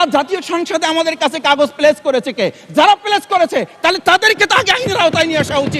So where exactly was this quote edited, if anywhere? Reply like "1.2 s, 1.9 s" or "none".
none